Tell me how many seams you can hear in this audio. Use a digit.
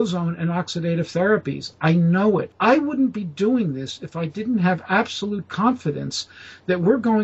1